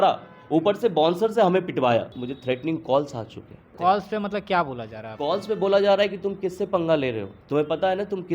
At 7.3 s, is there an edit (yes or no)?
yes